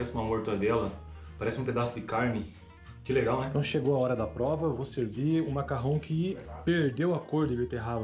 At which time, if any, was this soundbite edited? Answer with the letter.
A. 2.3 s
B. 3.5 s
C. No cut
B